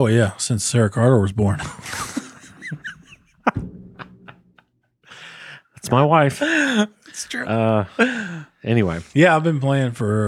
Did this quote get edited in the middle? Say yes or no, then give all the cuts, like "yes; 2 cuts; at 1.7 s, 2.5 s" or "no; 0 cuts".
no; 0 cuts